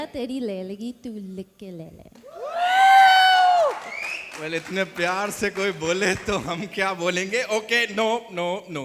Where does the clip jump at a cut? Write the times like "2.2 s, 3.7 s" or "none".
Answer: none